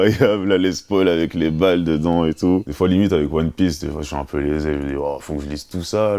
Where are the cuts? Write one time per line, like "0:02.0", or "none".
0:02.7